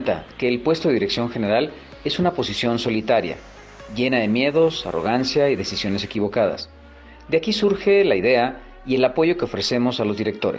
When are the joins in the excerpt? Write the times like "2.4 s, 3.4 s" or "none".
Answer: 1.1 s